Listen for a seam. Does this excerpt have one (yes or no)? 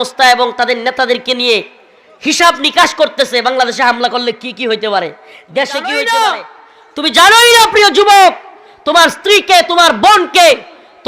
yes